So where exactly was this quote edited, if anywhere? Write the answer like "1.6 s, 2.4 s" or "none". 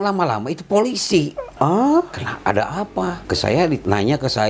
1.4 s, 2.2 s, 3.7 s